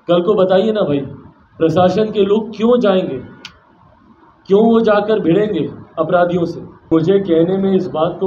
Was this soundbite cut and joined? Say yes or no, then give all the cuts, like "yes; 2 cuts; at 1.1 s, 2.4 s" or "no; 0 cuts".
yes; 1 cut; at 6.9 s